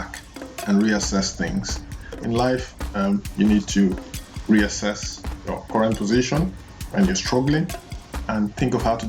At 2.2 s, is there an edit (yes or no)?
yes